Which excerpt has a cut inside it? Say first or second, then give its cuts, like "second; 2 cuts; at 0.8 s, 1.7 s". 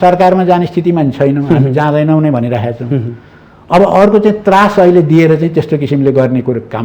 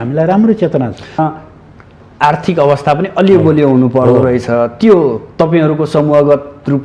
second; 1 cut; at 1.2 s